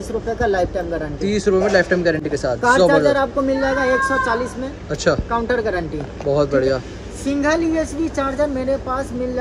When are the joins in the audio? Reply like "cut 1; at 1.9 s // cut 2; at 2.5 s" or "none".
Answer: none